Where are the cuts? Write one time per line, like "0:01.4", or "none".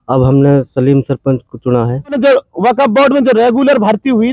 0:02.2